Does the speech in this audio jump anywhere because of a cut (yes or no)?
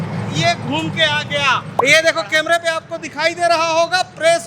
yes